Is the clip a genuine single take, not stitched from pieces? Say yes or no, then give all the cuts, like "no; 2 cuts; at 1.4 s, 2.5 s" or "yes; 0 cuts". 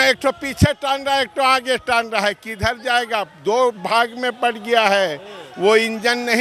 yes; 0 cuts